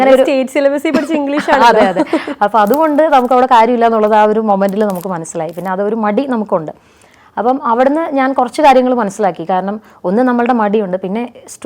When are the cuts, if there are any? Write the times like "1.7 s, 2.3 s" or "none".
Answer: none